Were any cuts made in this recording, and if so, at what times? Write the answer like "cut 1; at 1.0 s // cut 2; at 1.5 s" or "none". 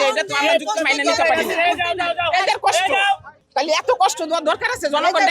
cut 1; at 3.4 s